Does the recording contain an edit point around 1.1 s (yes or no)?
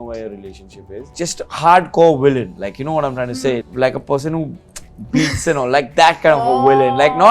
yes